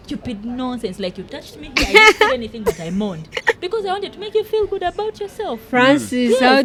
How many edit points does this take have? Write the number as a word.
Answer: zero